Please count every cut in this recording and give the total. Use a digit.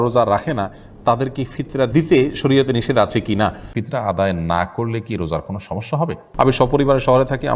3